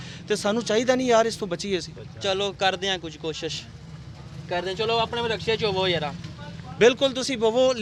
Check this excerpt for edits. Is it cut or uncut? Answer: uncut